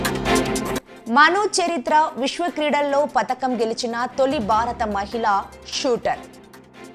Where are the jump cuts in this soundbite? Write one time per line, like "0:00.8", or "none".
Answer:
none